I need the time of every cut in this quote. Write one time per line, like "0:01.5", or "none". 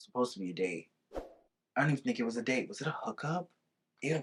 none